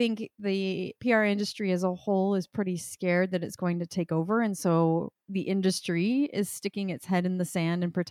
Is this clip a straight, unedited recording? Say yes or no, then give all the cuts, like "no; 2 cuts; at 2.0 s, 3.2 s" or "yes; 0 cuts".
yes; 0 cuts